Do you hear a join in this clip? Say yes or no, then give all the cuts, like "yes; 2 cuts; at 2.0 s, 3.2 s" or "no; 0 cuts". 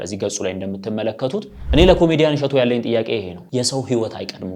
yes; 2 cuts; at 1.6 s, 3.4 s